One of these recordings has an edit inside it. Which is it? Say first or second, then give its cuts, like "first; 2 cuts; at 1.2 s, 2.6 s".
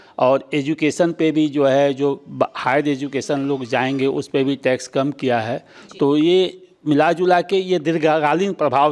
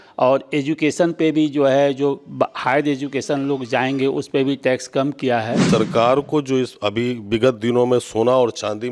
second; 1 cut; at 5.7 s